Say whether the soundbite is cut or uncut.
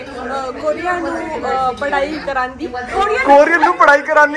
uncut